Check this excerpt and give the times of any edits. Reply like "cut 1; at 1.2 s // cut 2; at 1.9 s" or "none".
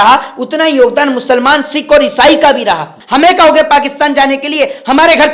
cut 1; at 2.9 s